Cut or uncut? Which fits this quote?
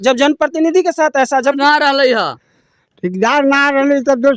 cut